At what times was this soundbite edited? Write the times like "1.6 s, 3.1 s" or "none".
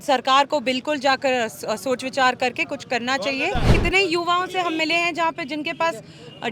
3.7 s